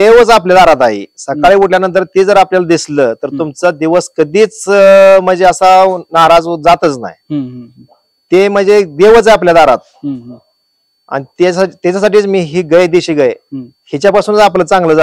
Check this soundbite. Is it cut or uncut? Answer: uncut